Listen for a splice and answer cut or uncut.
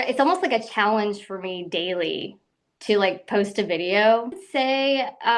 cut